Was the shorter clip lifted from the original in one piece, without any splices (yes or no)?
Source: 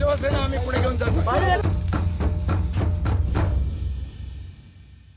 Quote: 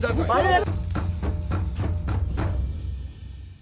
yes